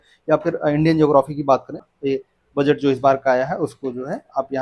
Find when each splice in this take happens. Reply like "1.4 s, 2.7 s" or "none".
1.8 s